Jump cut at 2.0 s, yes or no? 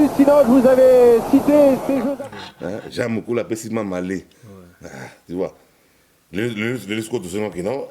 yes